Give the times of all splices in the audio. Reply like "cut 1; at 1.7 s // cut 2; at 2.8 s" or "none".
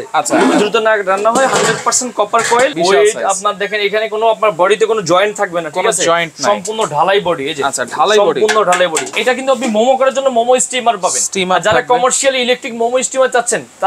cut 1; at 2.7 s // cut 2; at 9.1 s

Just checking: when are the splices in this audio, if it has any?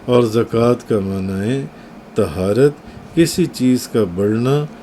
none

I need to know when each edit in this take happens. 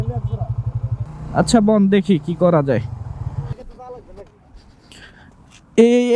cut 1; at 1.0 s // cut 2; at 3.5 s

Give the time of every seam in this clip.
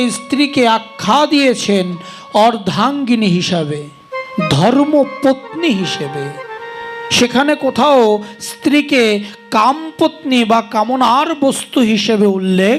none

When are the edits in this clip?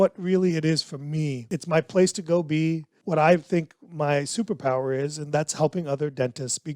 cut 1; at 1.5 s // cut 2; at 2.9 s

